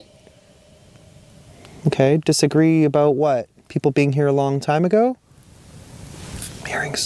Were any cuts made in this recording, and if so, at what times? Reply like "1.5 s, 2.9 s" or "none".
3.6 s, 5.6 s